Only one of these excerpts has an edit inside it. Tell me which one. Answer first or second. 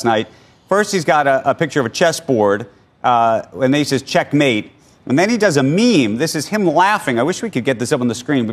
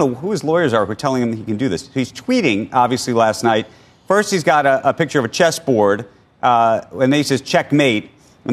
second